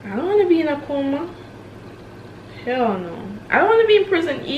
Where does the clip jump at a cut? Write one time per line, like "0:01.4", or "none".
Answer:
none